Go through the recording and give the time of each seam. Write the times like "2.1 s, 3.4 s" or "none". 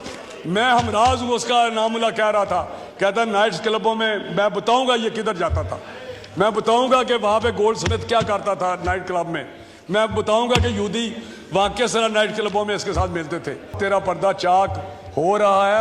13.7 s